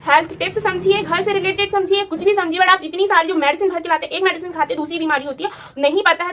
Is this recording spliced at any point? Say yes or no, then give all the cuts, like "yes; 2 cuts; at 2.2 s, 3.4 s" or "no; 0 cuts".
no; 0 cuts